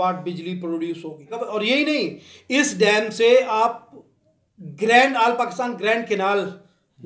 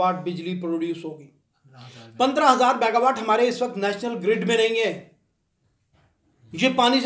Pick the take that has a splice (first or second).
first